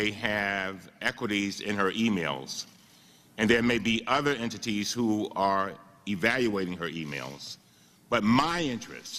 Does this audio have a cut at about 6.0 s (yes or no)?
no